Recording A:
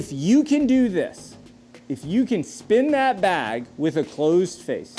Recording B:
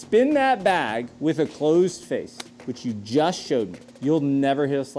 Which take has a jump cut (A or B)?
B